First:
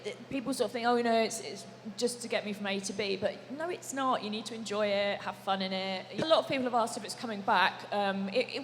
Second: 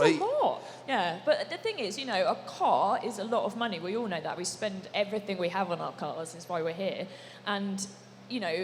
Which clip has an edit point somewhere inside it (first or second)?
first